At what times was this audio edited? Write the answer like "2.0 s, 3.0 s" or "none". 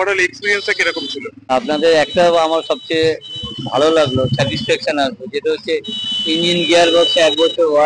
1.3 s